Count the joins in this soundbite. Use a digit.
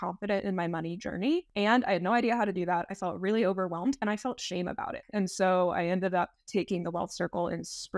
2